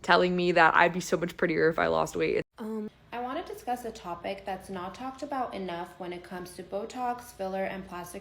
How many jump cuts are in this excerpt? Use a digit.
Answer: 1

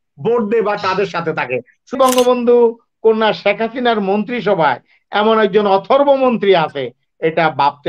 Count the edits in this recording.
1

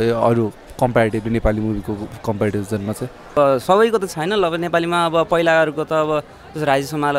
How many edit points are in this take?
1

